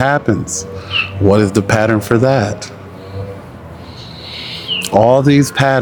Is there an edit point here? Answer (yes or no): no